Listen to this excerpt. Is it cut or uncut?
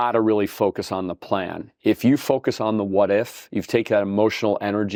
uncut